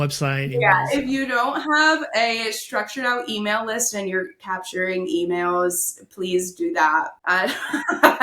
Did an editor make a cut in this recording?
yes; 1 cut; at 7.1 s

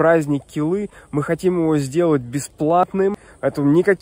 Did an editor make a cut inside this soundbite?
yes; 1 cut; at 3.0 s

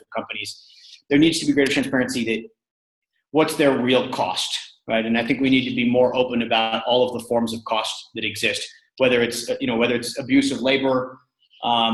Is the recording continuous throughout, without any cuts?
yes; 0 cuts

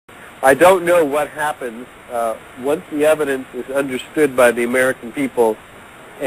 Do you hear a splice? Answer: no; 0 cuts

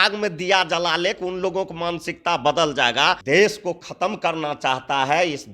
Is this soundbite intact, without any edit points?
no; 1 cut; at 3.2 s

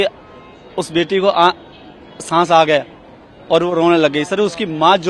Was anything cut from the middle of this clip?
no; 0 cuts

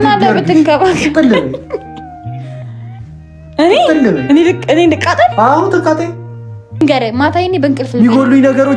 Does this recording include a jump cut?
yes; 3 cuts; at 1.8 s, 3.4 s, 6.8 s

